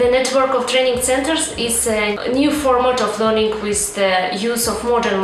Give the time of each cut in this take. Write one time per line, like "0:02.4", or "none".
0:02.1